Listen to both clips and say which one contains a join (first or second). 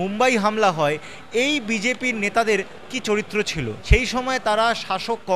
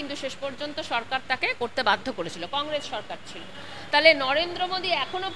first